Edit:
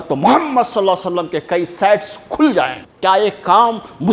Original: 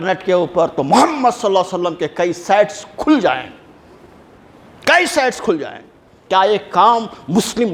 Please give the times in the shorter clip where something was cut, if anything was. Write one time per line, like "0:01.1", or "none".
0:02.8